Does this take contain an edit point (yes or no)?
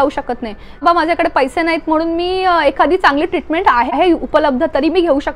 yes